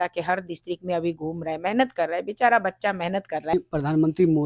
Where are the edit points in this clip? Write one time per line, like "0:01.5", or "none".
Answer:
0:03.5